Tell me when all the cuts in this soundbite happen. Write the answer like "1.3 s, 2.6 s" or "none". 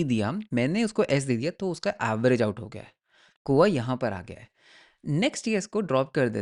none